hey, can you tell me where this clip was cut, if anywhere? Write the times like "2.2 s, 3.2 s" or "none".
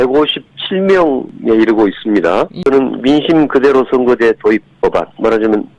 1.3 s, 2.7 s